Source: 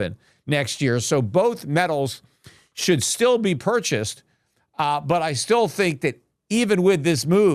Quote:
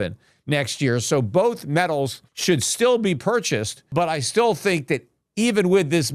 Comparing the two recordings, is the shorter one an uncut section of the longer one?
no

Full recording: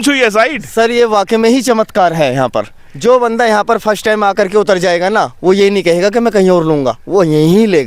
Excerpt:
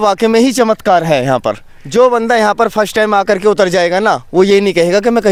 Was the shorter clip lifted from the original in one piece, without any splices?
yes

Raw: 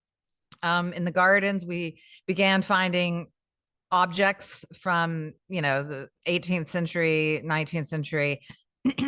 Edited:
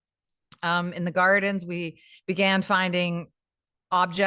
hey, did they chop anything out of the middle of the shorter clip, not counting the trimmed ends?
no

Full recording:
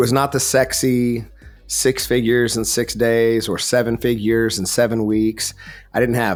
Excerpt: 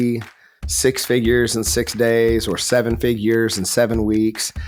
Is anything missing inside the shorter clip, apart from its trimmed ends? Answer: no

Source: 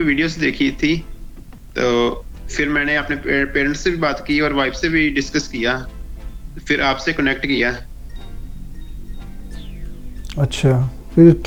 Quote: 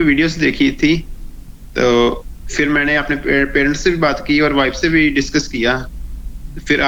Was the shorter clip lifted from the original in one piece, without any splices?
yes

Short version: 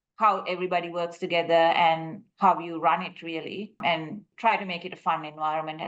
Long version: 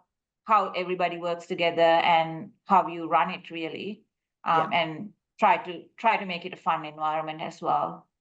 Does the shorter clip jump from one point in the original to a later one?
yes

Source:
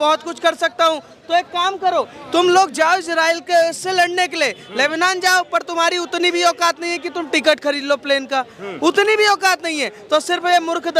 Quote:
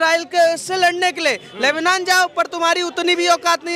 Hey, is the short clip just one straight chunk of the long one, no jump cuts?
yes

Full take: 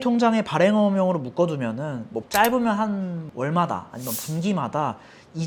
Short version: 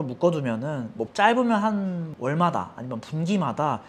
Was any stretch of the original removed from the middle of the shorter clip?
no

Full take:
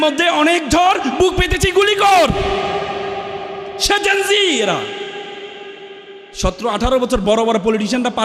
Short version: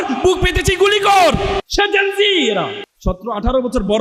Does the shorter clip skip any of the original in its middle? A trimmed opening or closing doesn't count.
yes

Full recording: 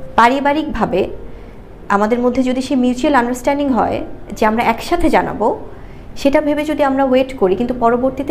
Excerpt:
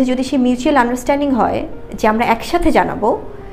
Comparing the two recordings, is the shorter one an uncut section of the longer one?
yes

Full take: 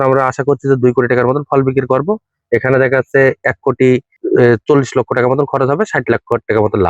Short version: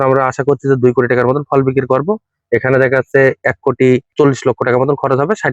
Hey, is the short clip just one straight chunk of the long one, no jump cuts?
no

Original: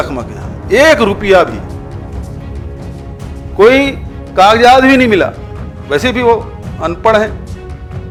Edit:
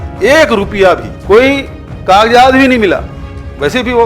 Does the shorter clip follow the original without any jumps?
no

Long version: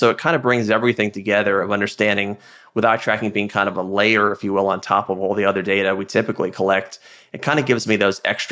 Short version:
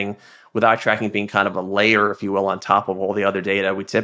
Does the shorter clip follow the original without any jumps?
yes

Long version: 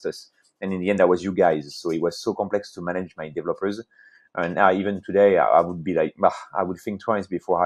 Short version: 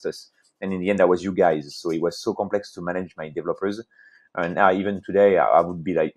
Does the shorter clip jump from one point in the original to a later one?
no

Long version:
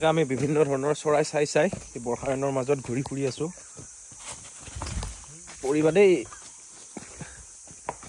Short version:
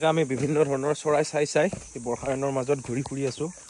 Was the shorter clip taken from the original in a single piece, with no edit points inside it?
yes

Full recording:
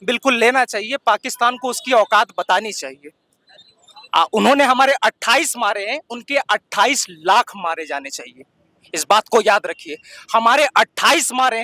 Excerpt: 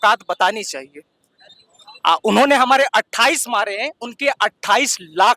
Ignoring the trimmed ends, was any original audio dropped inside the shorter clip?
no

